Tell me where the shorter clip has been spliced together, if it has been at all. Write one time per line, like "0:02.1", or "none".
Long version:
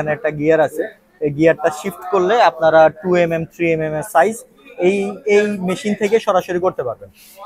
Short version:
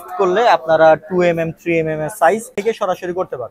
0:02.5